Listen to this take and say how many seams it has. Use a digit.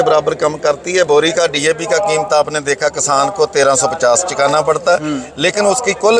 0